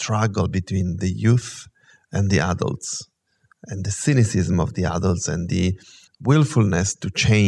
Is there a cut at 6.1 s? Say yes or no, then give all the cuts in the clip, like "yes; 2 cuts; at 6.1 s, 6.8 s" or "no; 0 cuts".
yes; 1 cut; at 6.1 s